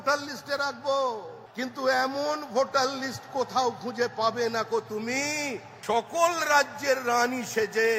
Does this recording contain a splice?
yes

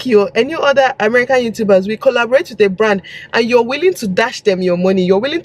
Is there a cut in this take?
no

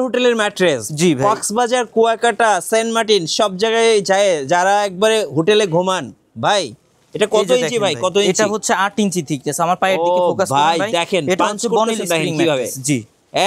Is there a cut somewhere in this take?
no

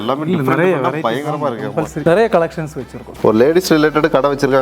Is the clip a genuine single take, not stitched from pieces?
no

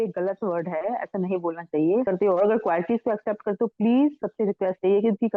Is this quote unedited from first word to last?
no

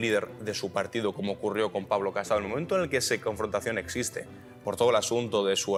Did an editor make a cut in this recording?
no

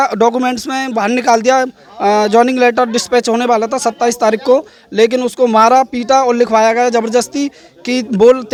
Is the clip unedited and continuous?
yes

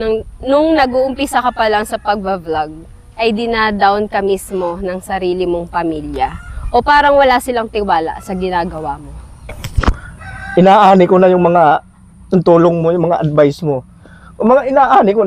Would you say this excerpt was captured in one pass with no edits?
no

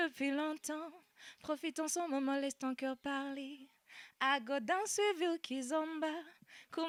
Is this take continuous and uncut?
yes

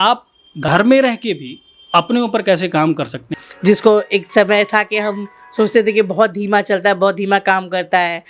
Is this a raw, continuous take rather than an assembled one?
no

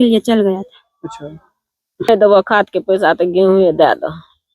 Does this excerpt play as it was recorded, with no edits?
no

